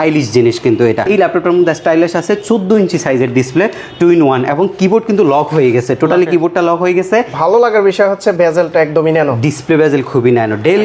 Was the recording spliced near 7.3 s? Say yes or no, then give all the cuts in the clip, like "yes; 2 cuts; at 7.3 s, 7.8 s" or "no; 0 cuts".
yes; 2 cuts; at 1.1 s, 7.3 s